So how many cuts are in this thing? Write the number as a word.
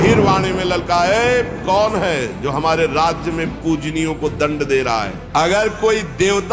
one